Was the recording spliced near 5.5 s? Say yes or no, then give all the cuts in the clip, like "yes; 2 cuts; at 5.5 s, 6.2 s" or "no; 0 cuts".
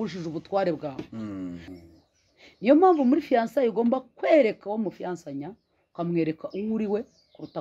no; 1 cut; at 1.7 s